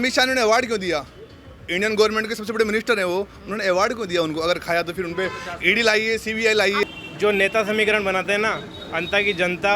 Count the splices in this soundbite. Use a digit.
1